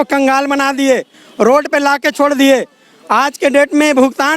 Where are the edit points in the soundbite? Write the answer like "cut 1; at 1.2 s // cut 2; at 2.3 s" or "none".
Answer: none